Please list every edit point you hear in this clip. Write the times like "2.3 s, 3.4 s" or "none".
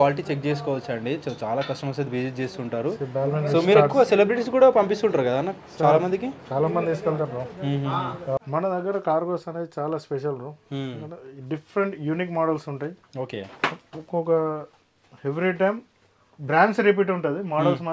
8.4 s